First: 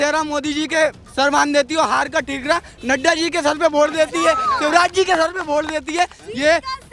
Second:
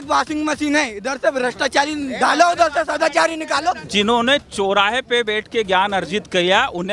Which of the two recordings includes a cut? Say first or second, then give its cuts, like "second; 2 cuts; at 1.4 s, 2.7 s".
second; 1 cut; at 3.9 s